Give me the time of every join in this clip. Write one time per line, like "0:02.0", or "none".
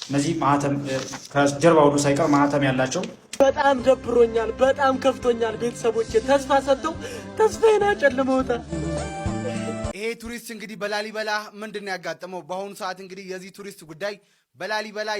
0:03.2
0:09.9